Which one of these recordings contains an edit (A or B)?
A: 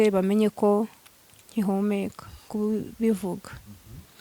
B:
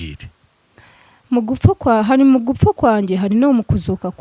A